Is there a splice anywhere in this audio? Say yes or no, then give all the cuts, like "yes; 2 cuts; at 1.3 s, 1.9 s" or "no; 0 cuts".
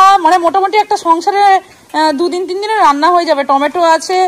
no; 0 cuts